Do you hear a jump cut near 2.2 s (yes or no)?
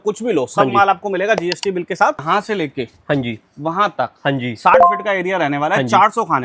yes